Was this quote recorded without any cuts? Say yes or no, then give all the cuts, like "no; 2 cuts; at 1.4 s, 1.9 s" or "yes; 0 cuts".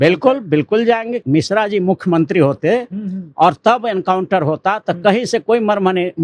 no; 1 cut; at 1.2 s